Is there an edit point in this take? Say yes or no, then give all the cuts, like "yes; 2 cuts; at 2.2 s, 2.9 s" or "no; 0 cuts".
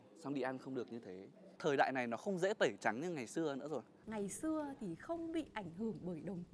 yes; 2 cuts; at 1.5 s, 4.0 s